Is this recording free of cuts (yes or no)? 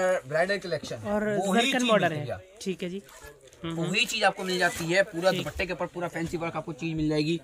yes